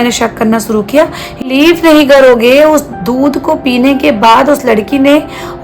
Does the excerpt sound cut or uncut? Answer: cut